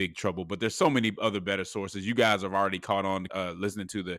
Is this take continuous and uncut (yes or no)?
no